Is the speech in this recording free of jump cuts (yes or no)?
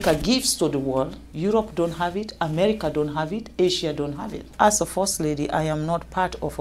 no